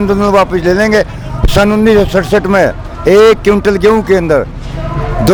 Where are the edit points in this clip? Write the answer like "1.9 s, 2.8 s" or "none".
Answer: none